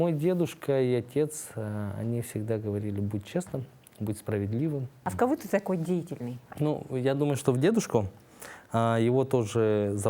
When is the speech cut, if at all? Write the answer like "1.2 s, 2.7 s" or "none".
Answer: 5.0 s

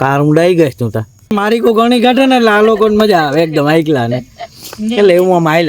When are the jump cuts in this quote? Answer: 1.3 s

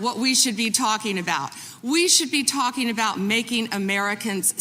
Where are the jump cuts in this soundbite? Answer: 1.6 s

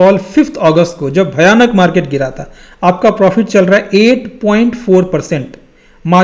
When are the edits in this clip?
none

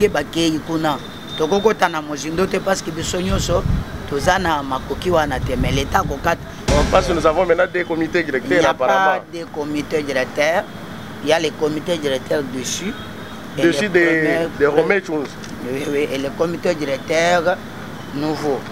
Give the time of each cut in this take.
6.6 s

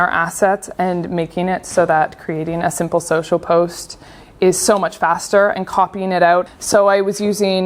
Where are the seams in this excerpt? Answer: 6.6 s

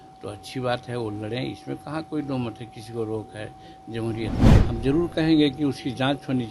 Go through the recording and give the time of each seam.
4.5 s

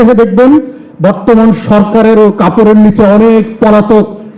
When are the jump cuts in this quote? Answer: none

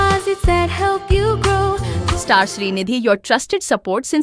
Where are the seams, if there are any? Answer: 1.9 s

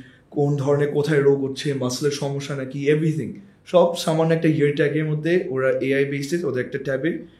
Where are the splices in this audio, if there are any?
none

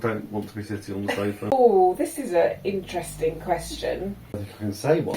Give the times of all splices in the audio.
1.5 s, 4.4 s

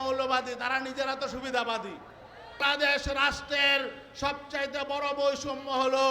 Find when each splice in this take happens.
2.6 s

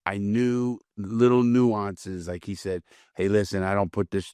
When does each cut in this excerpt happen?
0.9 s

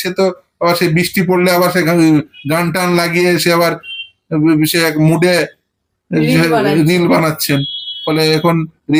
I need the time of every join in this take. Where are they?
none

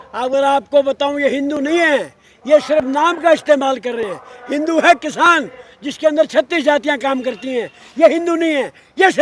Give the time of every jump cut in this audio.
none

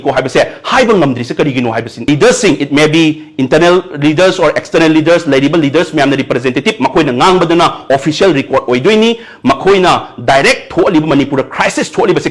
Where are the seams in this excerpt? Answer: 2.1 s

